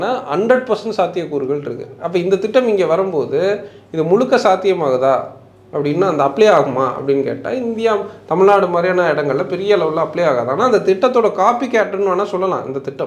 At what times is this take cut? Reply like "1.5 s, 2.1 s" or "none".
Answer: none